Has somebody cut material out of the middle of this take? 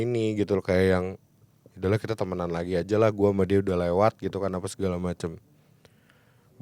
no; 0 cuts

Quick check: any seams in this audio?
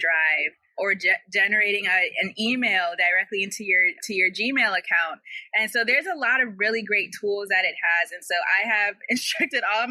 no; 0 cuts

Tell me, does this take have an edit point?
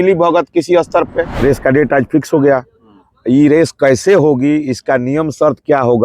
yes; 1 cut; at 1.3 s

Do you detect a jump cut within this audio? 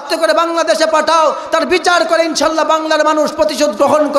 no; 0 cuts

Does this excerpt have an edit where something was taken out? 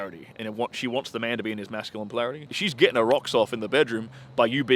yes; 1 cut; at 2.5 s

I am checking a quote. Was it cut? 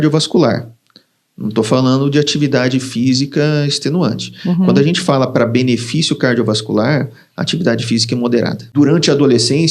yes; 1 cut; at 8.6 s

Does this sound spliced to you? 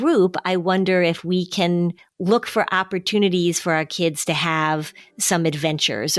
yes; 1 cut; at 2.1 s

